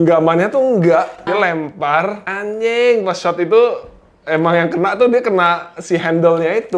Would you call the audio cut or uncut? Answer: cut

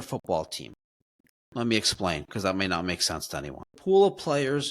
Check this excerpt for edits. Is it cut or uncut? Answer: cut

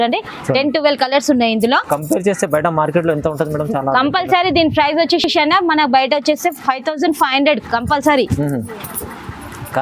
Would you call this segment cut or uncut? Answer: uncut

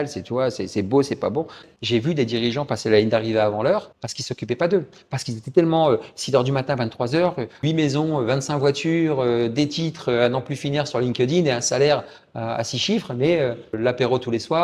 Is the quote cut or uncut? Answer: cut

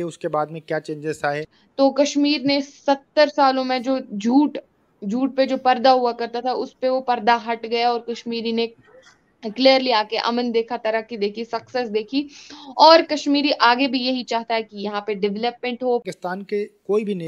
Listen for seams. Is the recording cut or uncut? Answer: cut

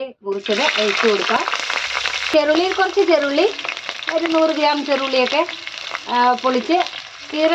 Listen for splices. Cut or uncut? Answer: cut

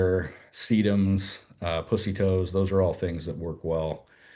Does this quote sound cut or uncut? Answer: uncut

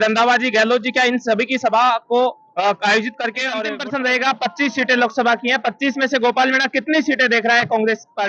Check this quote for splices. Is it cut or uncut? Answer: cut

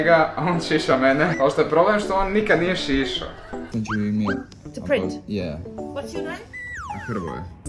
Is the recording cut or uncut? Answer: cut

